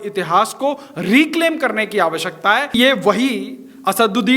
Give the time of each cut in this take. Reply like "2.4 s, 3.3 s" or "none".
2.7 s